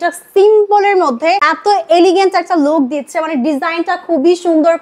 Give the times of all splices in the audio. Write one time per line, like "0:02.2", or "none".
0:01.5